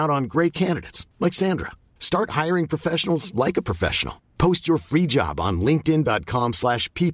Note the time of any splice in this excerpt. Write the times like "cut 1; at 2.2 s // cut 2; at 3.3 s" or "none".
none